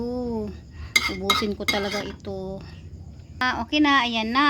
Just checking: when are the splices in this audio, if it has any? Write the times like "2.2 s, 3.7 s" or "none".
3.4 s

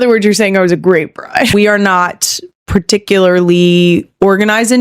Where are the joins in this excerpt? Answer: 1.7 s

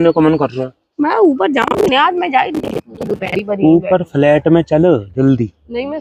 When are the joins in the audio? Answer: none

